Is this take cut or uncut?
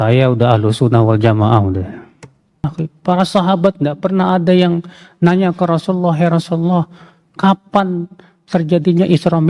cut